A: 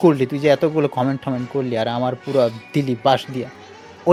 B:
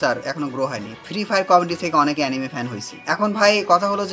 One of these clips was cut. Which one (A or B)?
B